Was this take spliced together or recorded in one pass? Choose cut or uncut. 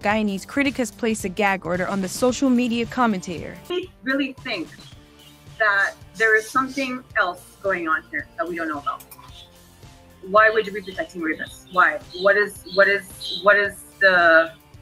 cut